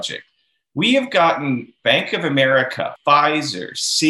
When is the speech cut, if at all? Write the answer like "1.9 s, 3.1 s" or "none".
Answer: 1.7 s, 2.9 s